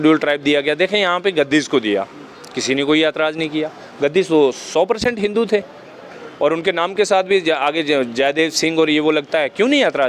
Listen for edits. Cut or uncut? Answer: uncut